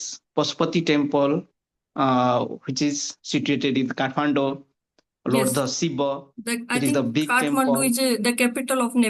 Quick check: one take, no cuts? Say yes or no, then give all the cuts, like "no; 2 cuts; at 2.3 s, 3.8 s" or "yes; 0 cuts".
yes; 0 cuts